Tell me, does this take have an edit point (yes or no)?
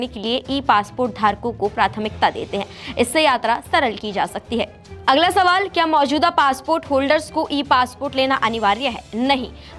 no